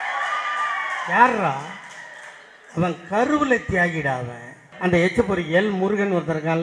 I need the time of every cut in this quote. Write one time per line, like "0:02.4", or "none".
0:04.7